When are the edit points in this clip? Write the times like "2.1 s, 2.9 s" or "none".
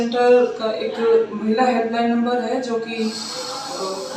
none

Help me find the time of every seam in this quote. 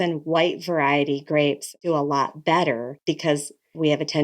1.7 s, 2.9 s

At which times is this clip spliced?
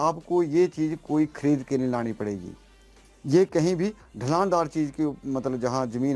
none

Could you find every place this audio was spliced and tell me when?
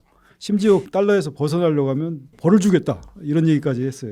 0.9 s, 2.3 s

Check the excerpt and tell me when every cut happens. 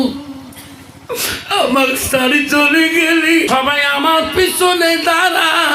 3.5 s

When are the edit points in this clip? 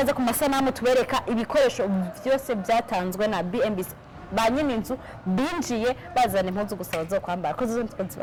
none

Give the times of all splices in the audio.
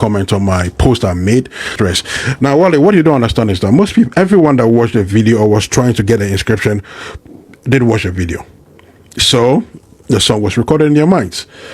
1.7 s

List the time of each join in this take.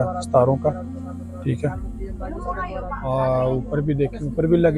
none

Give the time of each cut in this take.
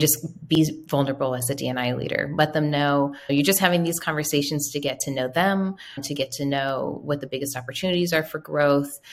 3.3 s

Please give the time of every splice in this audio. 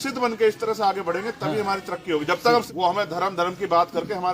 2.7 s

